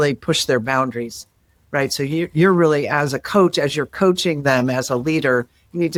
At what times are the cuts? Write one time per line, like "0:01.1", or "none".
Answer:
none